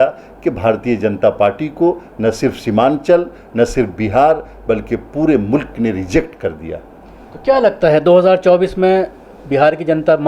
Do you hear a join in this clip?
no; 0 cuts

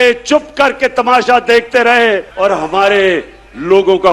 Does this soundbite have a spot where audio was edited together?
yes; 1 cut; at 2.3 s

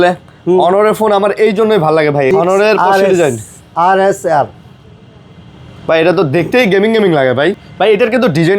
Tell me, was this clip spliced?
yes; 2 cuts; at 2.3 s, 7.6 s

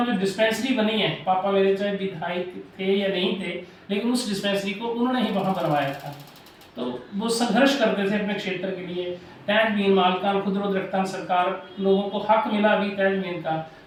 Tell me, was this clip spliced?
no; 0 cuts

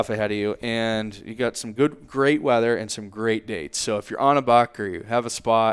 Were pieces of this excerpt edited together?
no; 0 cuts

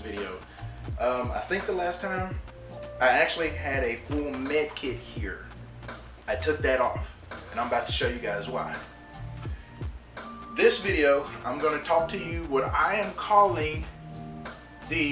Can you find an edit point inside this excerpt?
yes; 2 cuts; at 8.7 s, 10.6 s

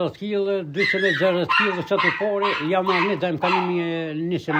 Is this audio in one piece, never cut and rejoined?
yes; 0 cuts

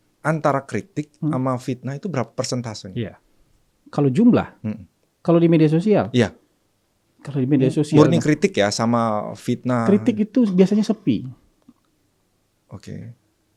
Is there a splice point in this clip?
no; 0 cuts

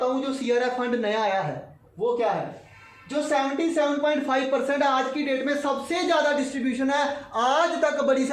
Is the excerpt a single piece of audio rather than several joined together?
yes; 0 cuts

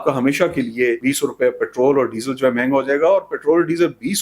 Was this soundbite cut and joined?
yes; 1 cut; at 1.0 s

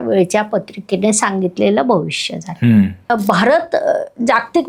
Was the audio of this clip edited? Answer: yes; 1 cut; at 3.1 s

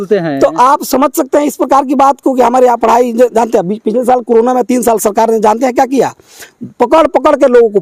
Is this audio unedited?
yes; 0 cuts

